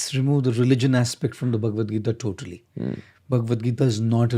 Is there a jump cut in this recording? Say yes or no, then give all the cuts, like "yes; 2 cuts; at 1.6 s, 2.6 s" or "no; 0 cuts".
no; 0 cuts